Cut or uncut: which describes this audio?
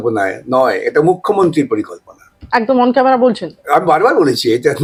uncut